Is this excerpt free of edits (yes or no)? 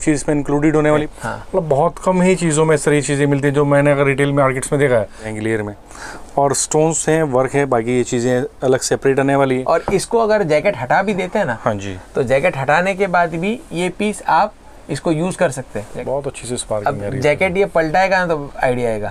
no